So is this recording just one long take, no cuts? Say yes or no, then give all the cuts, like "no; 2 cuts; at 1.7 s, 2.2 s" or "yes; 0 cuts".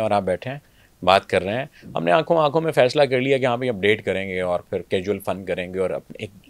yes; 0 cuts